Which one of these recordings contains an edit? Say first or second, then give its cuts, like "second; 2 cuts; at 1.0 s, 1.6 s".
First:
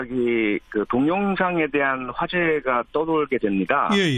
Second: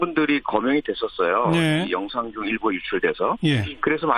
first; 1 cut; at 2.0 s